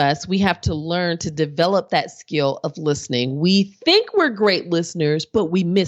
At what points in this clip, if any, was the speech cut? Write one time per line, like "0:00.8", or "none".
none